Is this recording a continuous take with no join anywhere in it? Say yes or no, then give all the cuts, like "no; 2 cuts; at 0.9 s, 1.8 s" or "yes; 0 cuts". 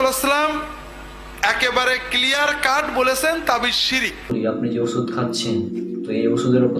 no; 1 cut; at 4.3 s